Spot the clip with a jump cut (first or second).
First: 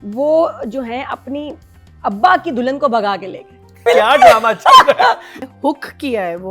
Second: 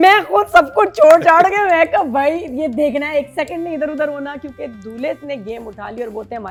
first